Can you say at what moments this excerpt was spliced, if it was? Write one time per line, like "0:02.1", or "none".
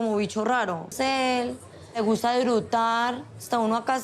0:00.9